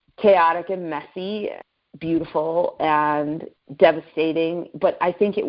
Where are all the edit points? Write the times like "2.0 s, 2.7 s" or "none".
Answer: 1.6 s